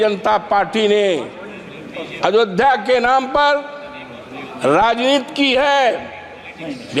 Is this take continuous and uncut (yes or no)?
yes